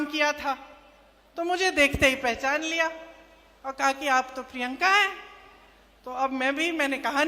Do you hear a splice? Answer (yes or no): no